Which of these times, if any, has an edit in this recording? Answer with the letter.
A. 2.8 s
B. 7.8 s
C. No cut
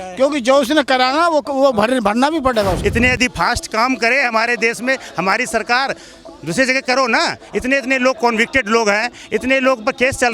A